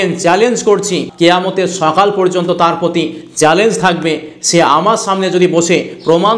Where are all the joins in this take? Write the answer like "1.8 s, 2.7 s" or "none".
1.1 s

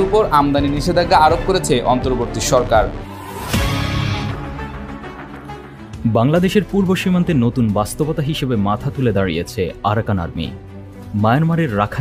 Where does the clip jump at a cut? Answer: 3.0 s

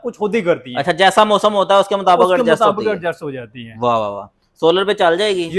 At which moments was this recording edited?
none

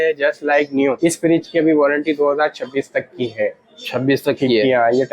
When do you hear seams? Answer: 1.0 s

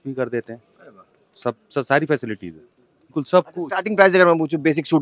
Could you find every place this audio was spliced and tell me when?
3.1 s

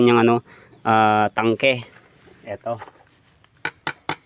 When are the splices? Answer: none

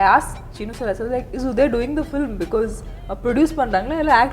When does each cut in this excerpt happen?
1.3 s

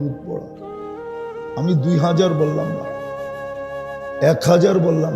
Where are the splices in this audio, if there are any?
2.8 s, 4.2 s

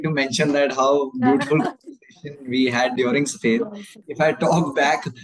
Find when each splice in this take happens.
4.0 s

